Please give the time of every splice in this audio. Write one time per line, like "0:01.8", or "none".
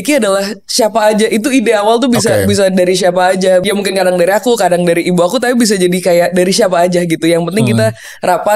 0:03.6